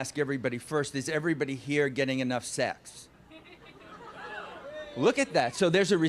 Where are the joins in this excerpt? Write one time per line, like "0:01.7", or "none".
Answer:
0:04.5

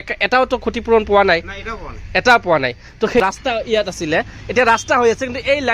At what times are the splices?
0:03.2

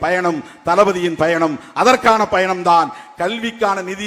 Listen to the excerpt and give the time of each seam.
none

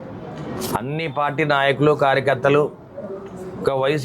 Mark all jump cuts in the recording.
0:01.5

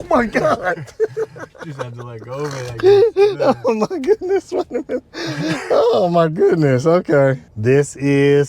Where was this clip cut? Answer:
0:07.5

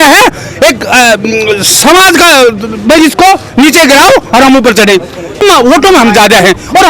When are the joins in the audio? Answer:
0:05.4

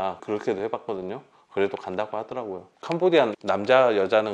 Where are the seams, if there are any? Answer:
0:02.7

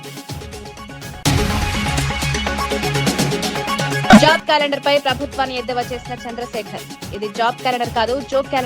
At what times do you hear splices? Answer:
0:01.2
0:04.1

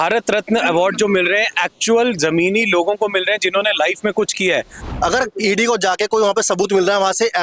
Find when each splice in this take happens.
0:04.8

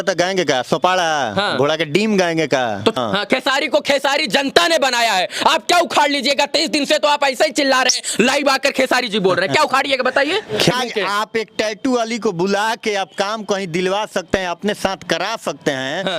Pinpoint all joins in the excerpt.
0:03.0
0:10.7

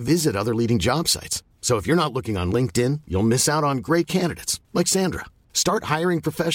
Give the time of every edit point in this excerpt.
none

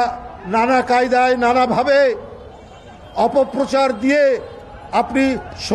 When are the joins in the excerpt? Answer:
none

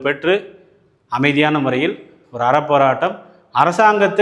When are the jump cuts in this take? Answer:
none

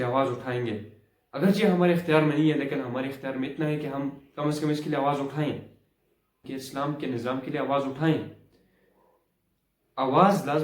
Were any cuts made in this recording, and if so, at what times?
0:06.5

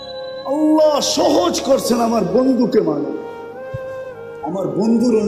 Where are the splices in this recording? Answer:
0:03.2
0:04.4

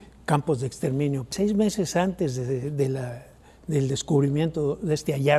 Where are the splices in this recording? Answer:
0:01.3

